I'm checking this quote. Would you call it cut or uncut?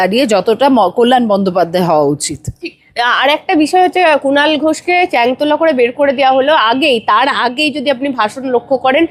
uncut